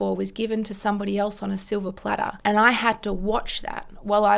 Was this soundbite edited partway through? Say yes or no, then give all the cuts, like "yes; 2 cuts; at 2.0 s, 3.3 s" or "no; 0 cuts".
yes; 1 cut; at 2.3 s